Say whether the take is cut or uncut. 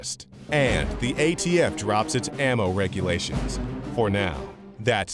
cut